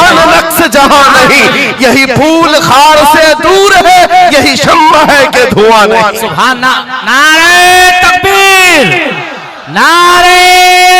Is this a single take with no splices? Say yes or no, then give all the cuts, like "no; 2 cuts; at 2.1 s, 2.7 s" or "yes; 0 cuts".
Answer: yes; 0 cuts